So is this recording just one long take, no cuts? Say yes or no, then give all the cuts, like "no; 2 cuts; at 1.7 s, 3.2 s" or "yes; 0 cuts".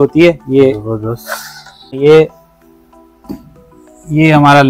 no; 1 cut; at 1.9 s